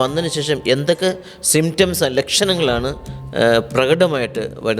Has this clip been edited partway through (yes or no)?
no